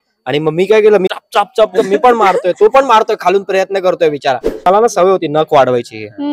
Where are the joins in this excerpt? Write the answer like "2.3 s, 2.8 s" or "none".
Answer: 1.1 s, 4.6 s